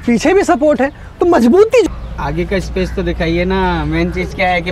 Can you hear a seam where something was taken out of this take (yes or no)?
yes